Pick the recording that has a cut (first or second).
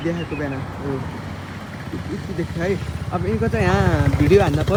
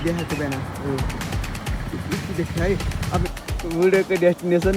second